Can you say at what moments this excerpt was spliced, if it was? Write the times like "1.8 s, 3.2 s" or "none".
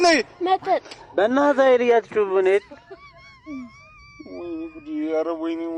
none